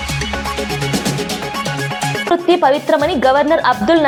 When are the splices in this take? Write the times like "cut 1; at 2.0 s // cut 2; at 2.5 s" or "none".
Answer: none